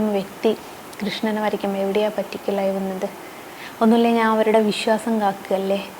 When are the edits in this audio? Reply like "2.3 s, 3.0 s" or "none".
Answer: none

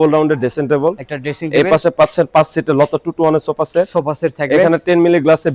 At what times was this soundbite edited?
none

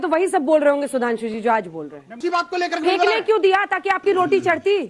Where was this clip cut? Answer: 2.2 s

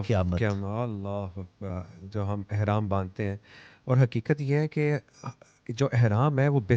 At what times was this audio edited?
1.7 s

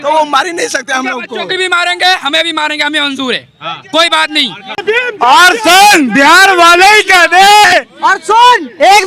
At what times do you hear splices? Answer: 4.8 s

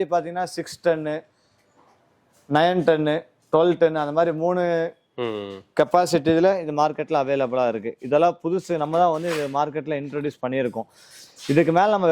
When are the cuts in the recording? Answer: none

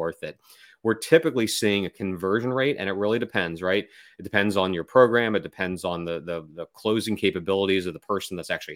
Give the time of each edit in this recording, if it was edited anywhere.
none

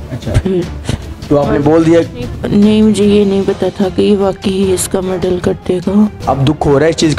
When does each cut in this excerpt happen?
6.2 s

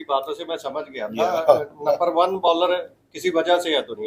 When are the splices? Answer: none

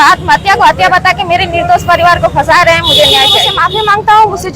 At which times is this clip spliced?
2.5 s, 3.5 s

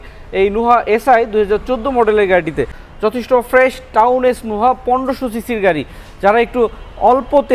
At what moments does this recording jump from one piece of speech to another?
2.8 s

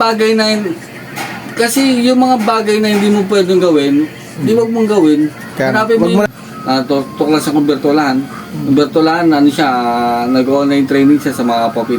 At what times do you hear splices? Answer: 6.3 s

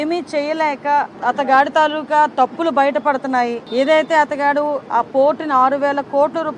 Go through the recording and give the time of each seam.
1.1 s, 3.6 s

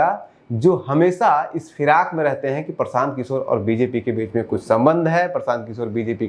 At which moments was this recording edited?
none

